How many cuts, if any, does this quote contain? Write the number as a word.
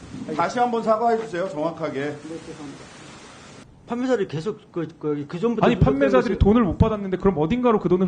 one